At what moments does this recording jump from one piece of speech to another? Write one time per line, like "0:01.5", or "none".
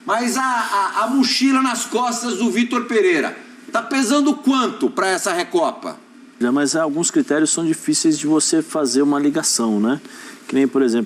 0:06.4